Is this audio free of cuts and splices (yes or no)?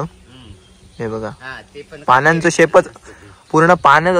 yes